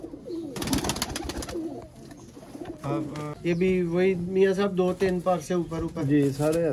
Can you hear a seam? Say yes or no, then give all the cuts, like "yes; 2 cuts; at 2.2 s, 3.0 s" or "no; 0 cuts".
yes; 1 cut; at 3.3 s